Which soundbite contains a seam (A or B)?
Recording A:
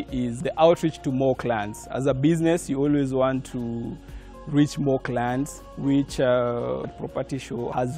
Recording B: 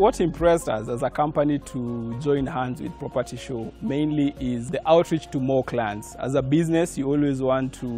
A